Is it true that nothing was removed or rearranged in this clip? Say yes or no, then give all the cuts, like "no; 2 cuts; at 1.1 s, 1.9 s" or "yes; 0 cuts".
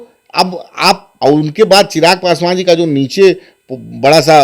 no; 1 cut; at 1.1 s